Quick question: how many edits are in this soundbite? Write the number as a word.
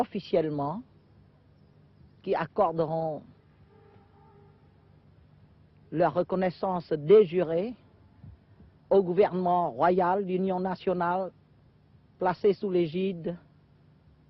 one